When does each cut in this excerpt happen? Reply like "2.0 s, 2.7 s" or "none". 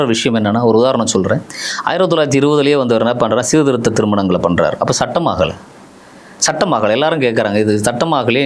none